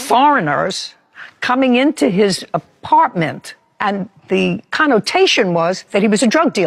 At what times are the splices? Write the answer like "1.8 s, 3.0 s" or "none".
none